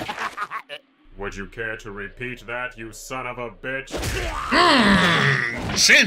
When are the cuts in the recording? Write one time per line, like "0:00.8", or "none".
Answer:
0:01.4